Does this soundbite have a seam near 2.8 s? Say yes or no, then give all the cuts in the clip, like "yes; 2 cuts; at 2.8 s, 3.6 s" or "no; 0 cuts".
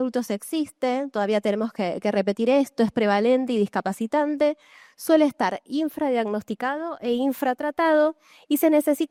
no; 0 cuts